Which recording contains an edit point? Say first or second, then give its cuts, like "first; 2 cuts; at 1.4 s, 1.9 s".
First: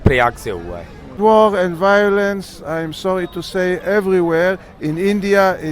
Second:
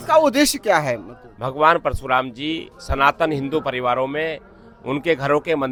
first; 1 cut; at 1.1 s